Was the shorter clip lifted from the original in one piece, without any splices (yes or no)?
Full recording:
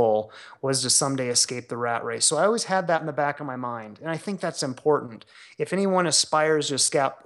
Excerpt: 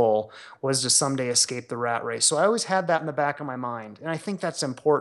yes